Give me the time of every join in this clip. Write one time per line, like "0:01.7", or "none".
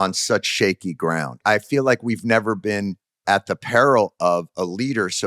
0:01.4
0:03.2